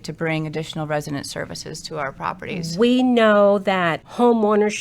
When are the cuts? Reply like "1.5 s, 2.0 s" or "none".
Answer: 2.6 s

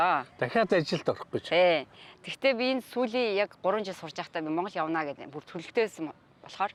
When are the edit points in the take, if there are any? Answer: none

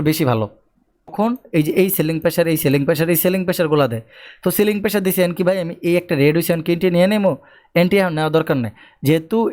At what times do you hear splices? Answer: 1.1 s

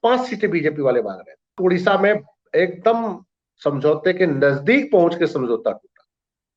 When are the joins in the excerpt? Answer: 1.6 s

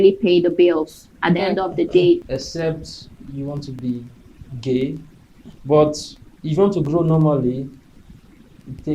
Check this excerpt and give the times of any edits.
2.2 s, 3.7 s, 5.5 s

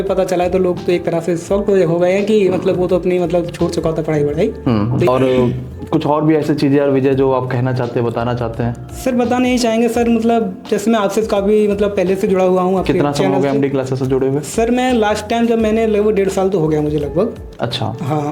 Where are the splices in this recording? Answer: 5.1 s

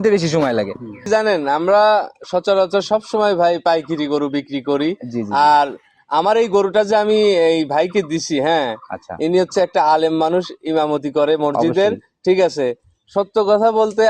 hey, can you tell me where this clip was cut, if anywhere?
1.0 s

